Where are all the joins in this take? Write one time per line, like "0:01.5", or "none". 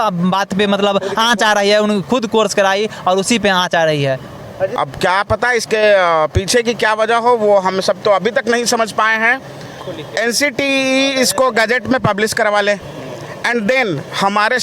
0:04.7
0:09.8